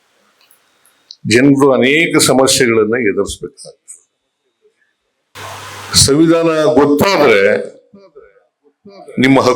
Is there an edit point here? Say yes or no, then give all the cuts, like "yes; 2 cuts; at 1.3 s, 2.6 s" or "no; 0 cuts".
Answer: yes; 1 cut; at 5.3 s